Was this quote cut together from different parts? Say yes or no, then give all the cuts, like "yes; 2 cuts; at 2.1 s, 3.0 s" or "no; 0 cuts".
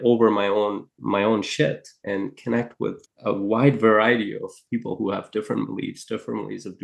yes; 3 cuts; at 0.9 s, 2.0 s, 3.1 s